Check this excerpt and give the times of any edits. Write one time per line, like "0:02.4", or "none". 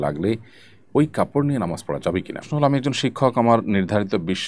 0:02.5